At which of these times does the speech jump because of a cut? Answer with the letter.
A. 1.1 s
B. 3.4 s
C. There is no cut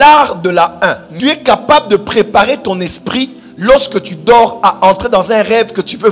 A